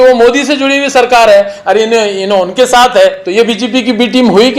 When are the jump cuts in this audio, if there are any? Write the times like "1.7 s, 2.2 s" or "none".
3.2 s

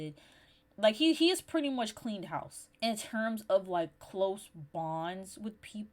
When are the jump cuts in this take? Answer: 2.6 s

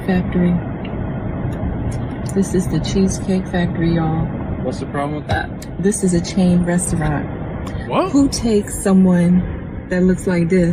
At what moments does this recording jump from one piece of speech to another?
none

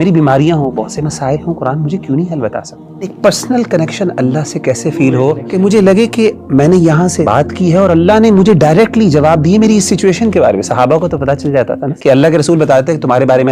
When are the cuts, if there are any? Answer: 3.1 s, 5.4 s, 7.2 s, 11.9 s

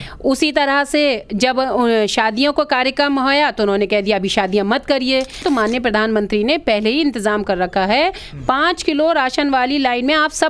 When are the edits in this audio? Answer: 5.4 s

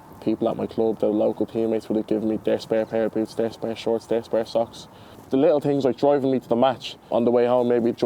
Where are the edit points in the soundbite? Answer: 7.1 s

